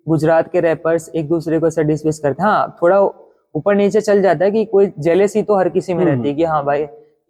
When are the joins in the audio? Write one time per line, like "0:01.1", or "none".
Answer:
none